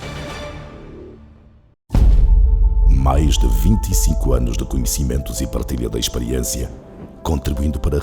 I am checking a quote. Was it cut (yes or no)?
yes